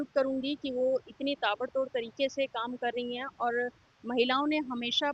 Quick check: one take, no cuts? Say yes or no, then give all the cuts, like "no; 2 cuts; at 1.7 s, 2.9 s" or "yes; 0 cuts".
yes; 0 cuts